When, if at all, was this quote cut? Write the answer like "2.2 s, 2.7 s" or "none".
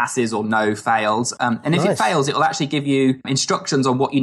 3.3 s